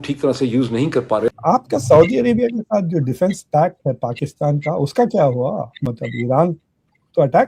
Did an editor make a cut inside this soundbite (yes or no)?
yes